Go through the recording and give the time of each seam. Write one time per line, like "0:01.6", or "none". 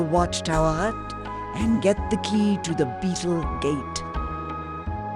0:03.9